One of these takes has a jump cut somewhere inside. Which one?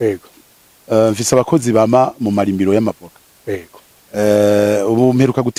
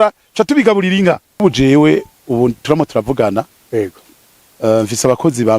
second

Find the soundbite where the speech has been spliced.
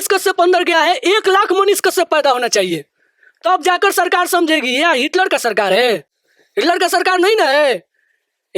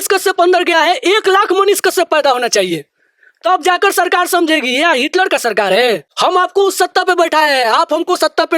second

